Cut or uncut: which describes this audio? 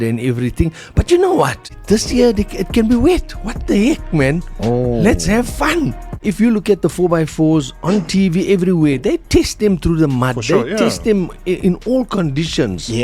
cut